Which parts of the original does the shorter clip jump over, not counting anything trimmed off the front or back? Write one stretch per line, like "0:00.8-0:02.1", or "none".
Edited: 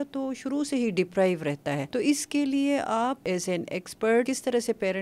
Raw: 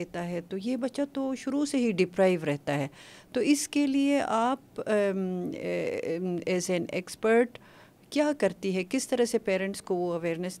0:02.9-0:03.3
0:04.6-0:06.4
0:07.5-0:08.9